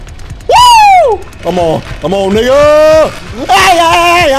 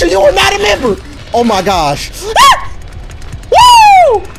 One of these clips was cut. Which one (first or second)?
second